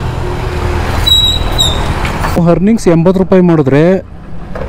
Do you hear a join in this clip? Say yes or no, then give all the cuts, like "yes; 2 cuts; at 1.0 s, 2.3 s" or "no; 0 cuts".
yes; 1 cut; at 2.4 s